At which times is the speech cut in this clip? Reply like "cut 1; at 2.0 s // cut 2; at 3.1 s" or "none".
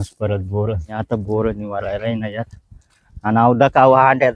cut 1; at 0.9 s